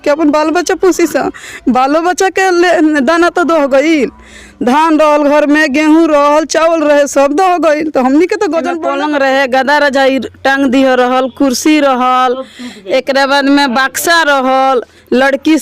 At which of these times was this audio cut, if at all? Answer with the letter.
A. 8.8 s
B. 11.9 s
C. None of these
A